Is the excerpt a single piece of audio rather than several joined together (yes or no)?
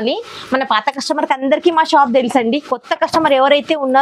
yes